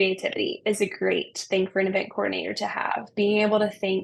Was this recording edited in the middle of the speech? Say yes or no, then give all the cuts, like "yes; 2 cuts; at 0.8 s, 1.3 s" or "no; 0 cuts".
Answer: no; 0 cuts